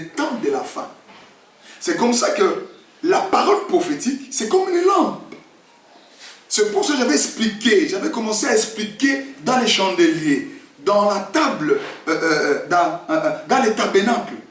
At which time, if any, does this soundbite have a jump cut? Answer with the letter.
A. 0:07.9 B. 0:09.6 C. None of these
C